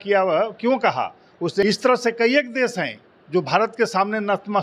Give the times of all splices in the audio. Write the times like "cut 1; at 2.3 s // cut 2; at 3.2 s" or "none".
cut 1; at 1.6 s